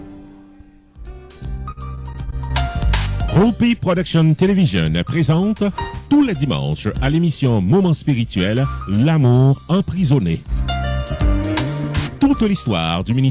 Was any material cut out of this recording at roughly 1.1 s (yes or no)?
yes